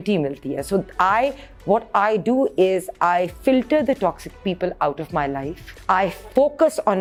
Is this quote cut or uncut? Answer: uncut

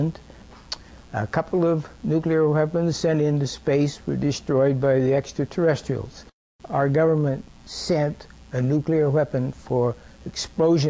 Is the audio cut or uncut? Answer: uncut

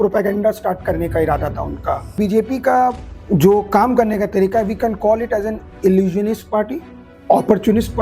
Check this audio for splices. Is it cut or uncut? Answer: cut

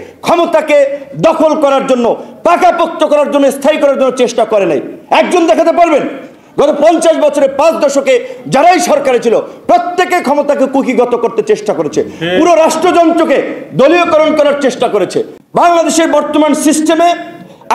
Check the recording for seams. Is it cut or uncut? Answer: cut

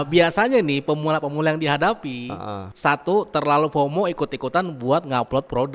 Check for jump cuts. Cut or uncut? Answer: uncut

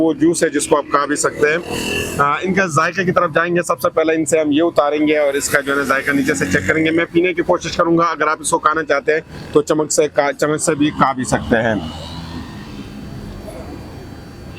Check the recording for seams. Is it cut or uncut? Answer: uncut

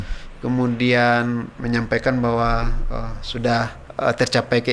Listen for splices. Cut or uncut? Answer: cut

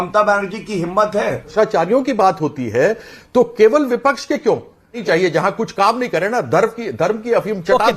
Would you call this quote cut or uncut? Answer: cut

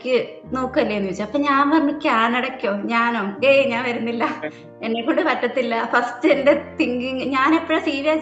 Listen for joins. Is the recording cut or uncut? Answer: uncut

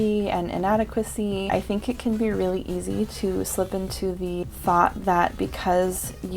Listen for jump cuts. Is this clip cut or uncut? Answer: cut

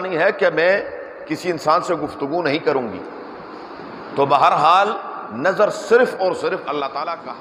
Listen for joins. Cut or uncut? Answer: uncut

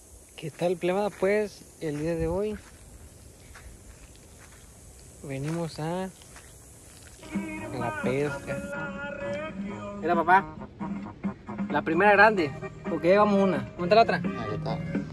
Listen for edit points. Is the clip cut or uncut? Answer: cut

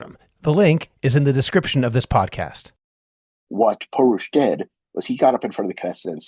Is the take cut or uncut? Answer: cut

